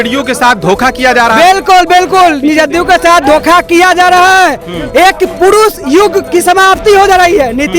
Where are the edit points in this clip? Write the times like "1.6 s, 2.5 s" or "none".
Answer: none